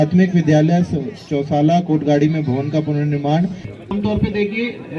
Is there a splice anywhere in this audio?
yes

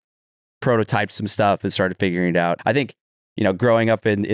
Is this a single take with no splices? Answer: no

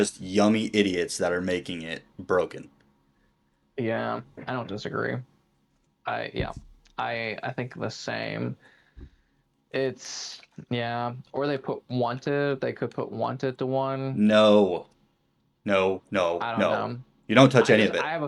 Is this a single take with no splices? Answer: yes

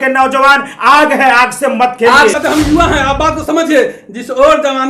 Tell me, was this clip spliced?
yes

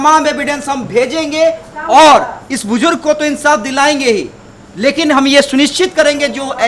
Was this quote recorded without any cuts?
yes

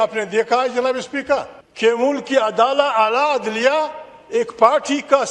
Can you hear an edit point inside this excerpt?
yes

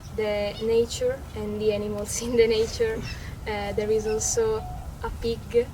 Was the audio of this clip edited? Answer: no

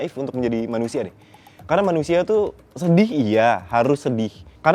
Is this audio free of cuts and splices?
yes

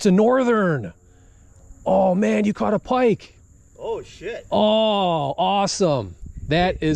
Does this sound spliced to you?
no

